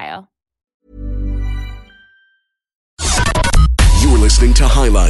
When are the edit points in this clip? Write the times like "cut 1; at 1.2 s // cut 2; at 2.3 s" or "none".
cut 1; at 2.9 s